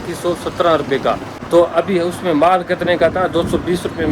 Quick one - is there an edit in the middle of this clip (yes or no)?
yes